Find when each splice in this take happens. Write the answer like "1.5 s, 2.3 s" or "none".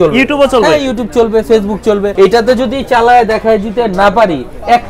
2.1 s